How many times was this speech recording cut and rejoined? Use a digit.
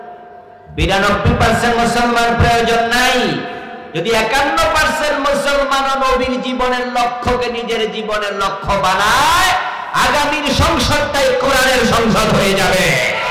0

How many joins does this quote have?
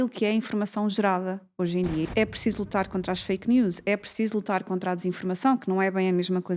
1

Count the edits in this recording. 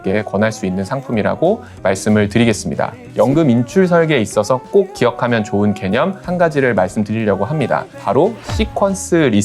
3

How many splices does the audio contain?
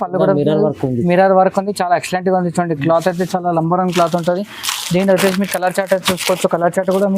0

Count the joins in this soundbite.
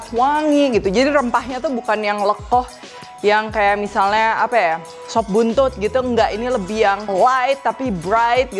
1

